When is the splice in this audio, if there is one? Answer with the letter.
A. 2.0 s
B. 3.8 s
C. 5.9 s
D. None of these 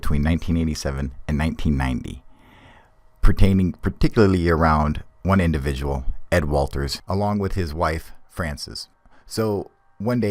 A